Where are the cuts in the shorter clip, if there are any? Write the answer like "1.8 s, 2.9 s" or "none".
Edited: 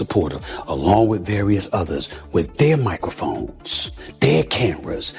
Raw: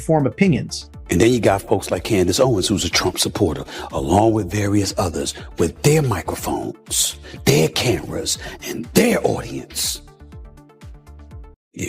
none